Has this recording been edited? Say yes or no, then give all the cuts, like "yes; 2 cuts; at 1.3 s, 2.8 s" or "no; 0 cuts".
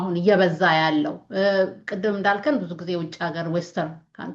no; 0 cuts